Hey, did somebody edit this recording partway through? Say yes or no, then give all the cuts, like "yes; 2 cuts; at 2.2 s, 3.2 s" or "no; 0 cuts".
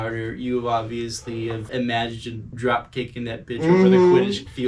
no; 0 cuts